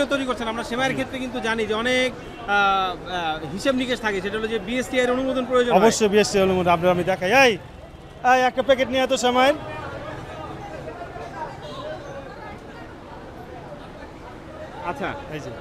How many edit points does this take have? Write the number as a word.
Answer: zero